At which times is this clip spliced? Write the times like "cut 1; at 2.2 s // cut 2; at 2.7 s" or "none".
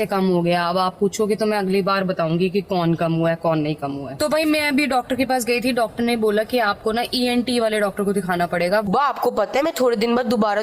cut 1; at 4.1 s // cut 2; at 8.9 s